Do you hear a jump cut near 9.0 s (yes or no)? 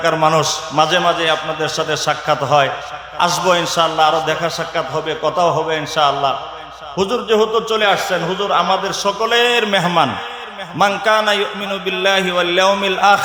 no